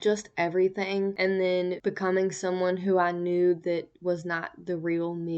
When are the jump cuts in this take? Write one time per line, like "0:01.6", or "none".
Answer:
0:01.1
0:01.8